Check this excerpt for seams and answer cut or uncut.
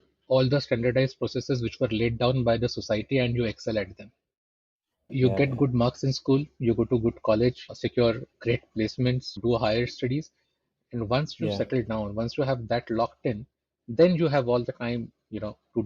cut